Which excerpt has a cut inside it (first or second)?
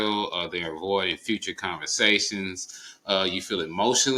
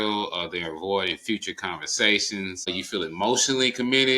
second